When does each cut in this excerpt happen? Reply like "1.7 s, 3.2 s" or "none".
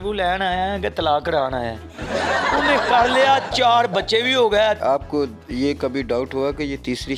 4.8 s